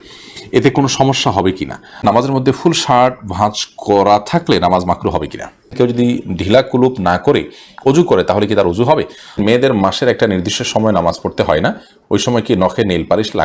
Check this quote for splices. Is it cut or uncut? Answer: cut